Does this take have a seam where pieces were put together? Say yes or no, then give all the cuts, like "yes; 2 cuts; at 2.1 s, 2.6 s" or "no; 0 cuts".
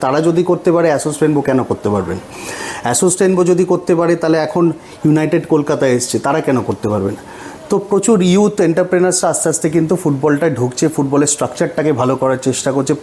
no; 0 cuts